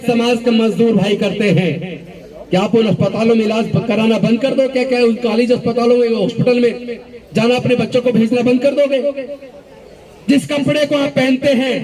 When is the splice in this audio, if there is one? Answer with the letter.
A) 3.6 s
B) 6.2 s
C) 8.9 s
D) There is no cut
D